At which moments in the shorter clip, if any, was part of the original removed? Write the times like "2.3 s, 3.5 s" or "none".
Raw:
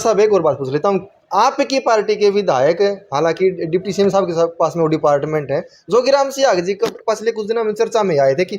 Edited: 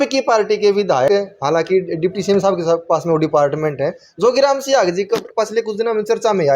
1.1 s